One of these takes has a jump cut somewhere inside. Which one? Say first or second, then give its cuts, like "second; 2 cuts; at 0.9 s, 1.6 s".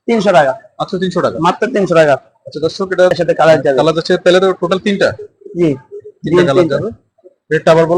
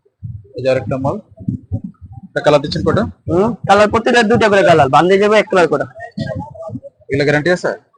first; 1 cut; at 3.1 s